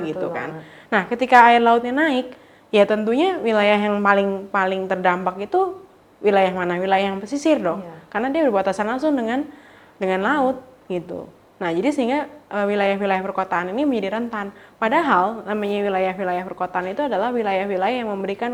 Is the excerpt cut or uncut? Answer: uncut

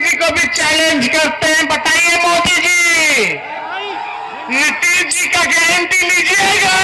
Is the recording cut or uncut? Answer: uncut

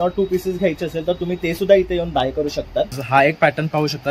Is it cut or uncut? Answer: cut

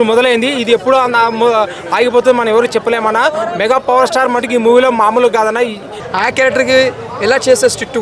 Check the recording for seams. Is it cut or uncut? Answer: cut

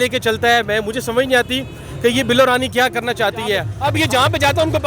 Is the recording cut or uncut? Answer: cut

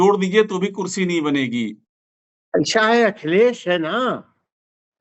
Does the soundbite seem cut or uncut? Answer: uncut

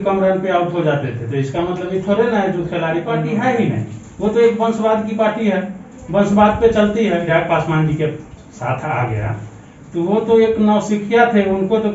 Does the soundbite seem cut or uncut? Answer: cut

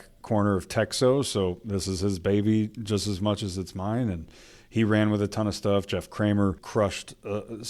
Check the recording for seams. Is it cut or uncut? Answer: cut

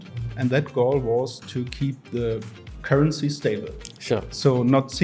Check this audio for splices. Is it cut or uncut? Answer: uncut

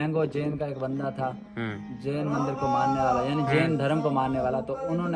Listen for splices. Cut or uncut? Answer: uncut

